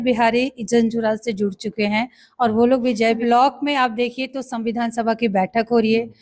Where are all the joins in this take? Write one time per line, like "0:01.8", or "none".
0:03.2